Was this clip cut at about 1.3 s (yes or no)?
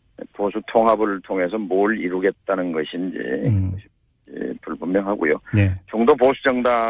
no